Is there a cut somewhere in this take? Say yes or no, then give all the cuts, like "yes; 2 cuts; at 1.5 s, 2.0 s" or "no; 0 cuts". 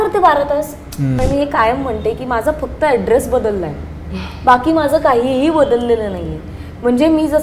yes; 1 cut; at 1.2 s